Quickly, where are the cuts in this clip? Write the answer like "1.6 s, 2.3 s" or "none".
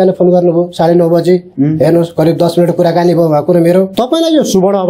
3.9 s